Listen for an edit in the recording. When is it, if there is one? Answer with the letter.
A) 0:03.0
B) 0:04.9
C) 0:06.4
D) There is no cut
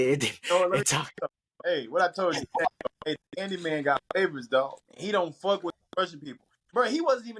B